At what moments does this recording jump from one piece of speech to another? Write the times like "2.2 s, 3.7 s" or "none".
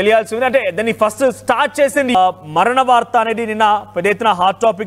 2.1 s